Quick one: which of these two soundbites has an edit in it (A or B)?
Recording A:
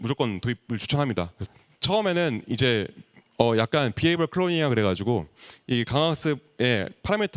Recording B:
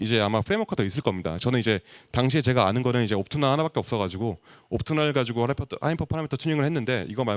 A